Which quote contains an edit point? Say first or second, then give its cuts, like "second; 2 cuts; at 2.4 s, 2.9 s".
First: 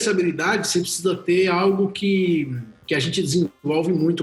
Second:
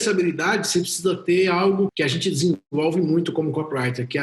second; 1 cut; at 1.9 s